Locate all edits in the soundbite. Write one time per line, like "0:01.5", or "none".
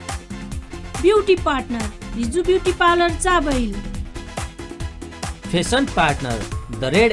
0:01.0

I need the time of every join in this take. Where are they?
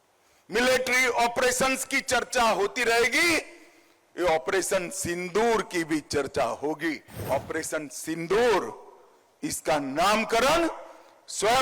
0:07.2

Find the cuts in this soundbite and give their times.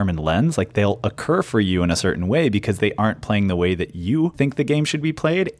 0:04.3

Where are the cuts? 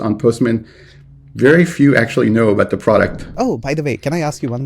0:03.2

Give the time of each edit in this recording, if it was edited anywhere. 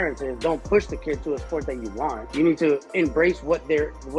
0:02.2
0:02.9

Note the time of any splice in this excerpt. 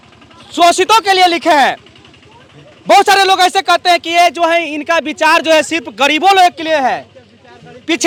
none

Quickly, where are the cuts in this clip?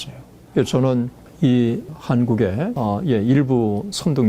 0:01.2
0:01.9
0:02.7

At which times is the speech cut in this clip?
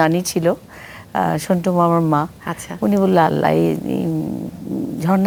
none

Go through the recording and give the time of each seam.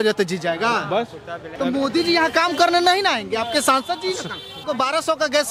0:01.5
0:04.6

